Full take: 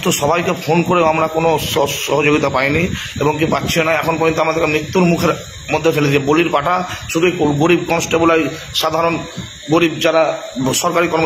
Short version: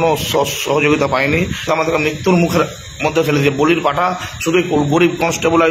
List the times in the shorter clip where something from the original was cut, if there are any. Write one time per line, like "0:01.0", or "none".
0:01.7